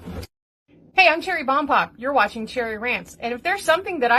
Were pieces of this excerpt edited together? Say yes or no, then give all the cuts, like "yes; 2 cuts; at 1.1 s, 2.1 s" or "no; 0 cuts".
no; 0 cuts